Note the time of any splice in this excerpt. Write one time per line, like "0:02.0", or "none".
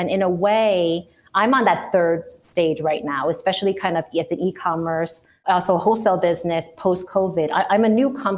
0:05.4